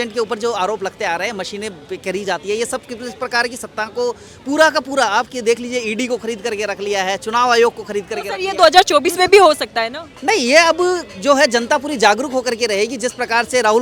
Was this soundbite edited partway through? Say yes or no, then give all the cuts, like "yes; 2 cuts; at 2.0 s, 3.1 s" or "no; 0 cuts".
no; 0 cuts